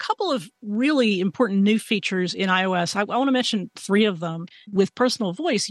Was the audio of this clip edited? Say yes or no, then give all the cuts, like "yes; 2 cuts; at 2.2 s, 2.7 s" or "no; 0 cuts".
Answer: yes; 1 cut; at 4.7 s